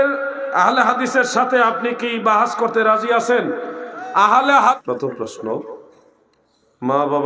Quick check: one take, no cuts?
no; 1 cut; at 4.8 s

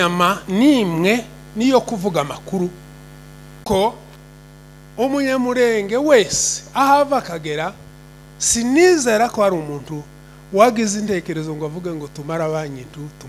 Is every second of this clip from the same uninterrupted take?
yes; 0 cuts

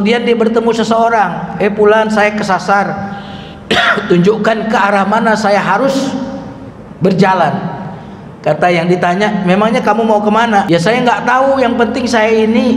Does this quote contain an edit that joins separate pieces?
yes; 1 cut; at 10.7 s

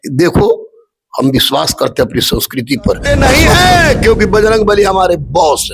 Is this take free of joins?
no; 1 cut; at 3.0 s

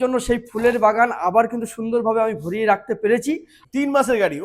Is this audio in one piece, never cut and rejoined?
no; 1 cut; at 3.6 s

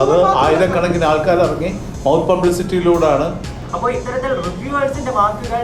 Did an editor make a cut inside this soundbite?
yes; 1 cut; at 3.5 s

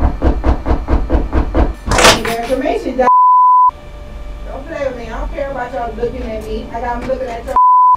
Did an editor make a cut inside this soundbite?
no; 0 cuts

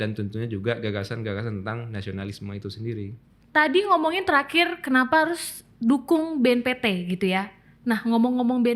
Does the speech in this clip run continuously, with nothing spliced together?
no; 1 cut; at 3.3 s

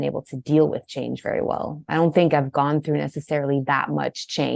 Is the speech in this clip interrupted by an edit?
no; 0 cuts

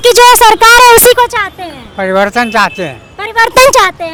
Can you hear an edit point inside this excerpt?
no; 0 cuts

